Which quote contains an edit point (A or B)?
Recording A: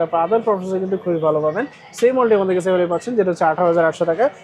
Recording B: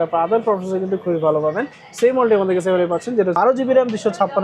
B